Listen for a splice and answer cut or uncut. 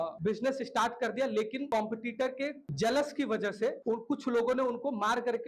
uncut